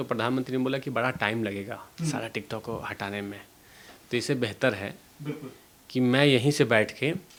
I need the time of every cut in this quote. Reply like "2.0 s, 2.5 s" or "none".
none